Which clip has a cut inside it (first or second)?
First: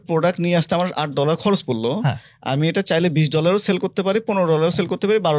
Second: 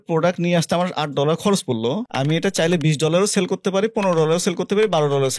second